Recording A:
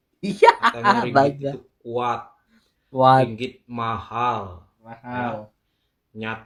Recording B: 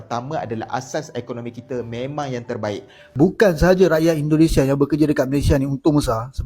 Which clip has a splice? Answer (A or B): B